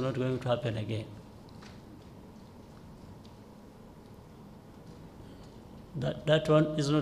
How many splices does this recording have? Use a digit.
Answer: 0